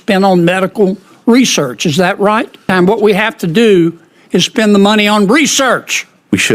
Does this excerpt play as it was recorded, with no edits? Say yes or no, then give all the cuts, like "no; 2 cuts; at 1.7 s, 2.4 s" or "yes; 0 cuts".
no; 1 cut; at 2.6 s